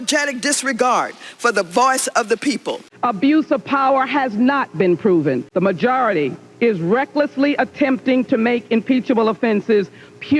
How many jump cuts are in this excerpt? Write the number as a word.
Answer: one